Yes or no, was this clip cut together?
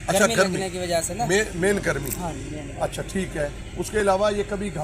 no